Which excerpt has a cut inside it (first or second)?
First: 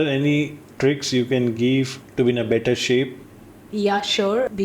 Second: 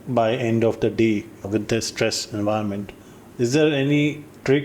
first